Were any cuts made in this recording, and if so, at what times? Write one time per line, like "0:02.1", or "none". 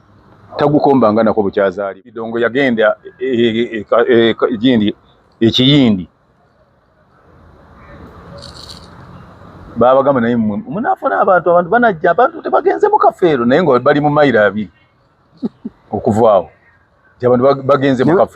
0:02.2